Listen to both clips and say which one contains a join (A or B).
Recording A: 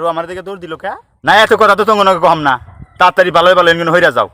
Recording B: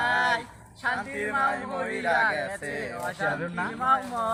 A